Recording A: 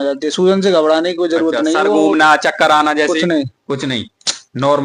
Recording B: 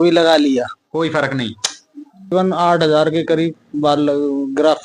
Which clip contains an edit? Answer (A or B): B